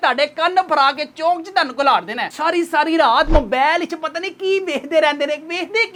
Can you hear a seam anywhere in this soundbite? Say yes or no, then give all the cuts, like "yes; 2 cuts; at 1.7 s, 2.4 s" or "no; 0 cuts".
no; 0 cuts